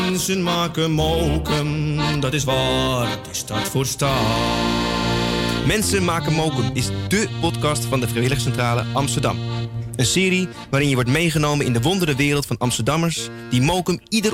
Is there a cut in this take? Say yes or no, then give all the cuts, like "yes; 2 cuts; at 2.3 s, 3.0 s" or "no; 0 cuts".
no; 0 cuts